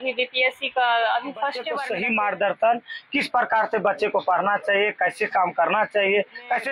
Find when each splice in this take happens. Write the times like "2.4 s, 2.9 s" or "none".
1.8 s